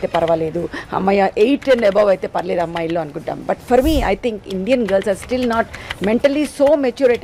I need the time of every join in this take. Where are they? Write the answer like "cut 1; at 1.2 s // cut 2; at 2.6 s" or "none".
none

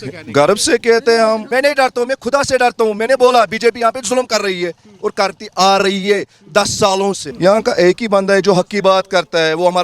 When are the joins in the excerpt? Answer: cut 1; at 1.4 s // cut 2; at 7.3 s

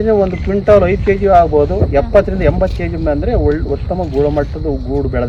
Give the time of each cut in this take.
none

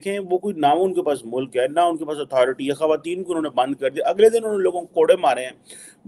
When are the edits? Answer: none

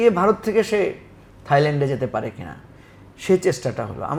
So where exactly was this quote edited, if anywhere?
none

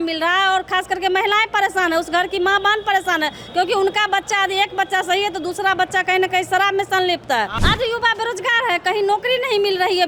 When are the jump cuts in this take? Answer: cut 1; at 7.6 s

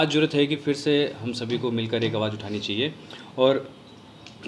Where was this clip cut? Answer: none

